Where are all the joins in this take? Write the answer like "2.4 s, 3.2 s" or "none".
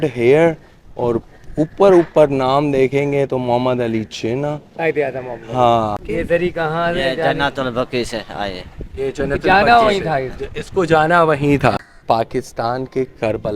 6.0 s, 11.9 s